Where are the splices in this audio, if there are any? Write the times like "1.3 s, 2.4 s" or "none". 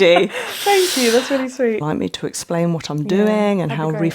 1.8 s